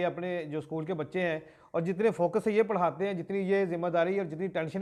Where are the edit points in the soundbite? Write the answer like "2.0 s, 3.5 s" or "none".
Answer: none